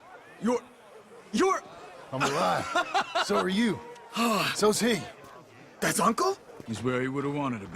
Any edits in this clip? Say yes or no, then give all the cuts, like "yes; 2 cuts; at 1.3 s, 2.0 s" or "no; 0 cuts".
yes; 1 cut; at 6.6 s